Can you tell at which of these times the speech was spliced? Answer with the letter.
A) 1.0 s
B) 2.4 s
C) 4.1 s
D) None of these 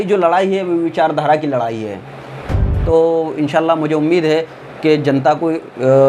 B